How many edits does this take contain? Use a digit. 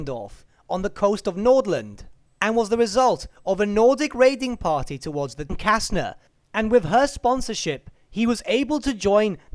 0